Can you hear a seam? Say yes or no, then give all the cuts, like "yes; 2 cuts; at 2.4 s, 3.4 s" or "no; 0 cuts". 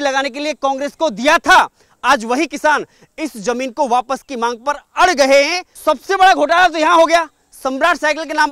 yes; 1 cut; at 5.6 s